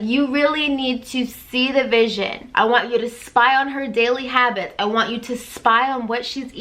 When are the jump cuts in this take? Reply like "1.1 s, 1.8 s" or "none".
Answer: 2.4 s